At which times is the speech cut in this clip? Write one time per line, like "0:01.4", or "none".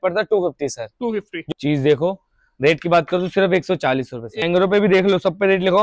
0:01.5
0:04.4